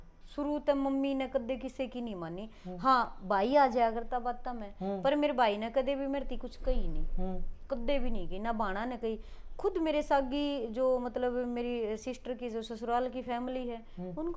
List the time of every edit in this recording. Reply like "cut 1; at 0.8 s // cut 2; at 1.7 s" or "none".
none